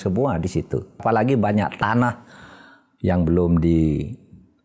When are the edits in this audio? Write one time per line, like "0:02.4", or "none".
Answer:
0:01.0